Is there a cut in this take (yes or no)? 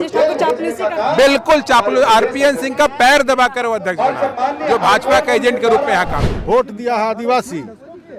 yes